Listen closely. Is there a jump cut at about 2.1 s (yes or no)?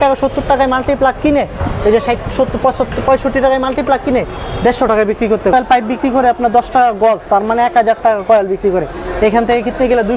no